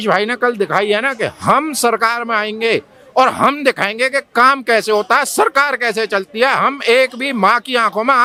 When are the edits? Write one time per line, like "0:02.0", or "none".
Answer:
none